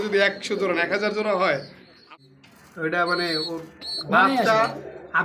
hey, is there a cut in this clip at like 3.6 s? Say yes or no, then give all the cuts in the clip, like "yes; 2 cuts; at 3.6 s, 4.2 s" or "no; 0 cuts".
no; 1 cut; at 2.1 s